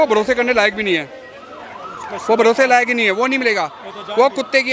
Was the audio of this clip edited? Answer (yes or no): no